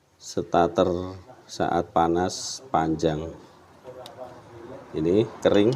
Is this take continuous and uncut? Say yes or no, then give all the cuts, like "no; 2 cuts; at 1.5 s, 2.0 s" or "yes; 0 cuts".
yes; 0 cuts